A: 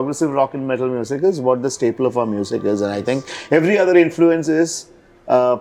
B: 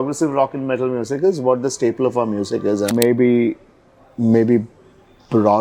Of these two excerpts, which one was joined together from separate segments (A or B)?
B